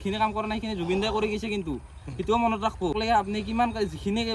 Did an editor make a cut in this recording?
yes; 1 cut; at 2.9 s

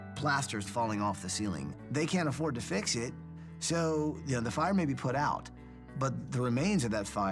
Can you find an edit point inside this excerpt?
yes; 1 cut; at 1.8 s

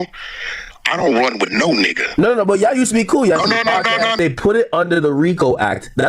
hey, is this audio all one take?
no; 1 cut; at 4.2 s

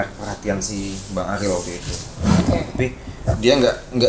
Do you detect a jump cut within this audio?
no; 0 cuts

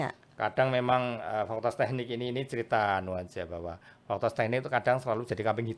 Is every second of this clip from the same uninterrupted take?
yes; 0 cuts

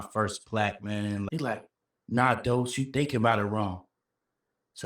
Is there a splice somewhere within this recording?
yes; 1 cut; at 1.3 s

